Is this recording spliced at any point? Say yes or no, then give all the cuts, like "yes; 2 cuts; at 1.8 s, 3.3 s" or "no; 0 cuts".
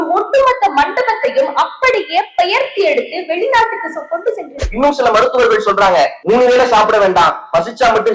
yes; 1 cut; at 4.5 s